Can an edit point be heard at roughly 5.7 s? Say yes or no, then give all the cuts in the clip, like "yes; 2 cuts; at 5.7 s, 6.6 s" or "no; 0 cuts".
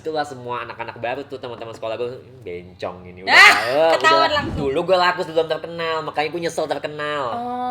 no; 1 cut; at 4.5 s